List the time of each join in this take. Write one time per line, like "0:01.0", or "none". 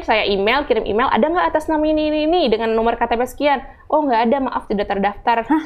none